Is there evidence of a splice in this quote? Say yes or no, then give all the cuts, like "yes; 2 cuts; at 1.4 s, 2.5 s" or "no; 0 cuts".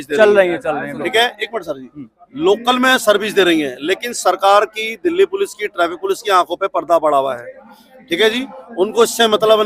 no; 0 cuts